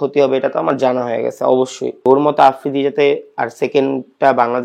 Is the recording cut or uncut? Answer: cut